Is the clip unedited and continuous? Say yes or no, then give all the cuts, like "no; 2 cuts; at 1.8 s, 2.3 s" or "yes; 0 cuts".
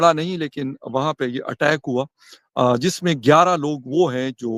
yes; 0 cuts